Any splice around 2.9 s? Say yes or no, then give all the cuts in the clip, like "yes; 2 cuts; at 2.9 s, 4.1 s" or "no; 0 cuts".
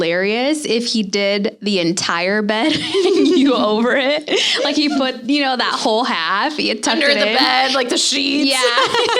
no; 0 cuts